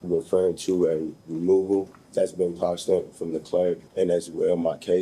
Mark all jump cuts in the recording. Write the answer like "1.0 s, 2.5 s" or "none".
2.0 s, 3.9 s